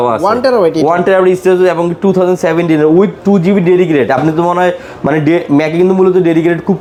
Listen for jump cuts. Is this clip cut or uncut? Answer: uncut